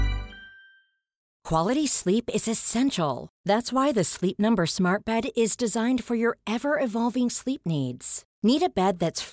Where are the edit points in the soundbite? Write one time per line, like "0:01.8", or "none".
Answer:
0:01.3